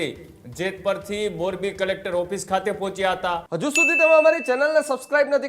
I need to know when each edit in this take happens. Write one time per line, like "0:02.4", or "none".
0:03.5